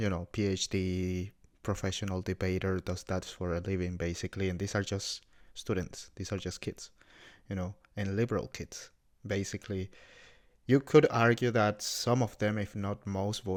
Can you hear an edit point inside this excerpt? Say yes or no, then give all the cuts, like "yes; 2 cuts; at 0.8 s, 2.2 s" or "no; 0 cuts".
no; 0 cuts